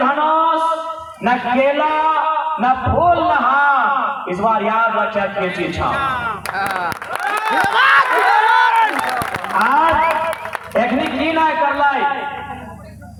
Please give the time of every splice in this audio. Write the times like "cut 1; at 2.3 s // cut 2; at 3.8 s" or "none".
none

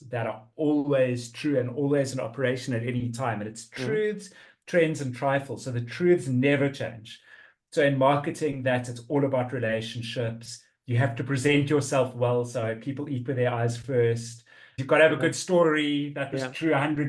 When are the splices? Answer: cut 1; at 14.8 s

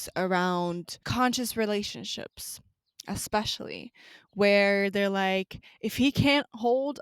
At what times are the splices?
cut 1; at 1.1 s

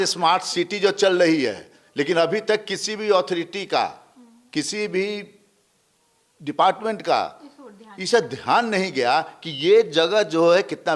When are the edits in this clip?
none

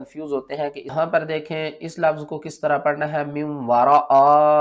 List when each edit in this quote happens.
cut 1; at 0.9 s

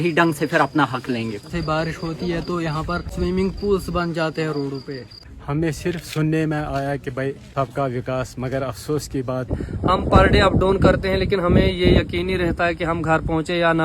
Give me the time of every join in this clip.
cut 1; at 1.5 s // cut 2; at 5.1 s // cut 3; at 9.6 s

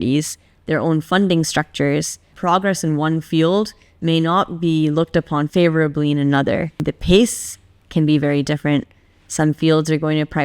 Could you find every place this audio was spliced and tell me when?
cut 1; at 2.3 s // cut 2; at 5.5 s // cut 3; at 6.9 s

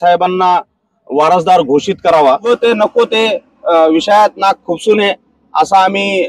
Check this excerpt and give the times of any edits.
cut 1; at 2.4 s

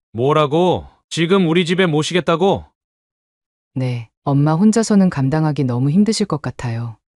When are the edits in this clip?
cut 1; at 1.0 s

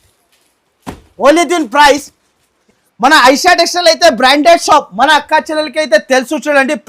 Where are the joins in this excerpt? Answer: cut 1; at 2.6 s

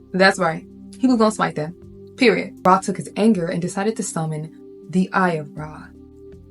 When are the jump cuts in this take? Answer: cut 1; at 2.5 s

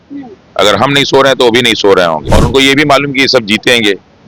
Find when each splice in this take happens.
cut 1; at 2.3 s

